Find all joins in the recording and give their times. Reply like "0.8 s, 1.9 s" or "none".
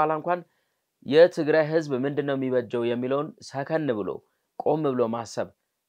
none